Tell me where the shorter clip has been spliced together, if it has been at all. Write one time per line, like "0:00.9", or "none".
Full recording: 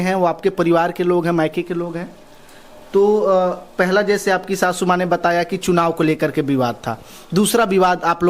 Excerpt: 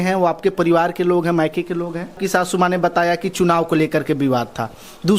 0:02.2